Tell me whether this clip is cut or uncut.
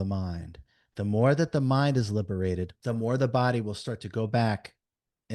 cut